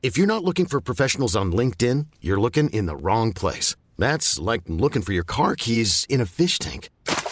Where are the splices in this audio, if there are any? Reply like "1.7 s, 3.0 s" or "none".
none